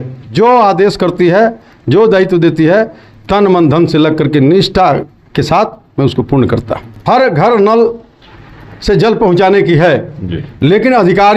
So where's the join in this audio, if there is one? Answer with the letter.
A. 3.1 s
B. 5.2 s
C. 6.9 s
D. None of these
C